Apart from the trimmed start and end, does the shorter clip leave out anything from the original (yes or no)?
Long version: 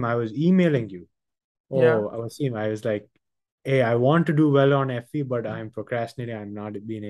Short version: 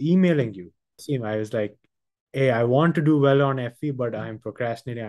yes